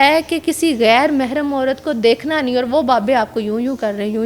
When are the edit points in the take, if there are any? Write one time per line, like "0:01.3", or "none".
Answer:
none